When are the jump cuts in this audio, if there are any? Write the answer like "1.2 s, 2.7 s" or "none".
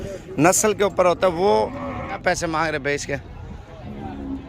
2.2 s